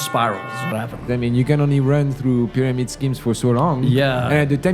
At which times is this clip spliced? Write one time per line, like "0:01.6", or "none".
0:01.1